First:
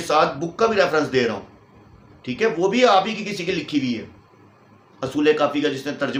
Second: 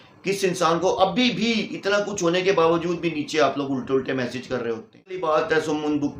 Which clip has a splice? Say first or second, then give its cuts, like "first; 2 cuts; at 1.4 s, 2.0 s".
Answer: second; 1 cut; at 5.2 s